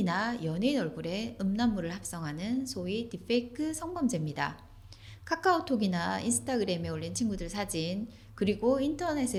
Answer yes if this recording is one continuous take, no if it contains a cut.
yes